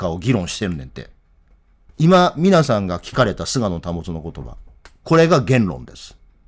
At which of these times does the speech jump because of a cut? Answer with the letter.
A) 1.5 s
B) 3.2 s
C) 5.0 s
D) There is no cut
D